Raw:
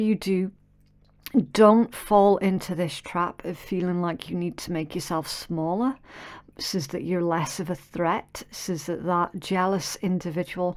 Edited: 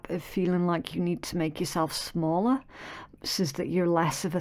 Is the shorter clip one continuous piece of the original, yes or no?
yes